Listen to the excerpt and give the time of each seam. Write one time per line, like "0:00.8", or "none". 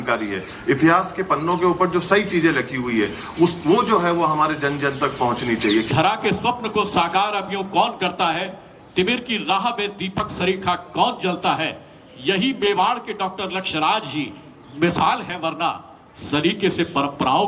0:05.9